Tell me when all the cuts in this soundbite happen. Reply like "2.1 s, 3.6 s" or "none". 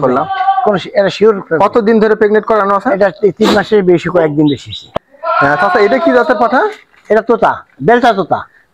4.9 s